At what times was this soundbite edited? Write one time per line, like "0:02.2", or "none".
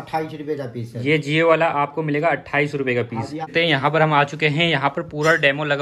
0:03.4

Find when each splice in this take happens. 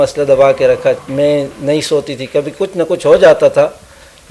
0:01.0

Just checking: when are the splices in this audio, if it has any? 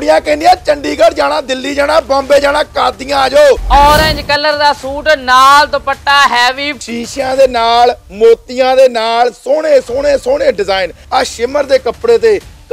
0:03.6
0:06.8
0:11.0

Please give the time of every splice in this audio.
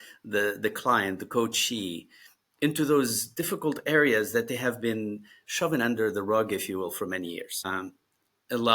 0:07.7

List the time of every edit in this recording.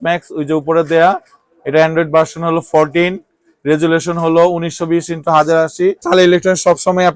0:06.0

